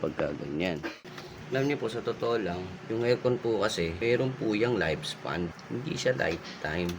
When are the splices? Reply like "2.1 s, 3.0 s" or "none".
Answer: 0.9 s, 2.7 s, 3.9 s, 5.6 s